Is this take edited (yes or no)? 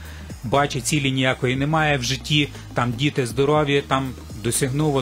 no